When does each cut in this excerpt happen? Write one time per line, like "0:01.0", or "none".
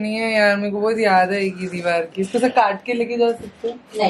none